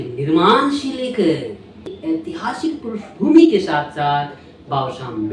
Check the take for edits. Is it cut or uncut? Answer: uncut